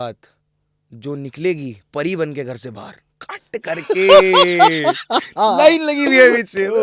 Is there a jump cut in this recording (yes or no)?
no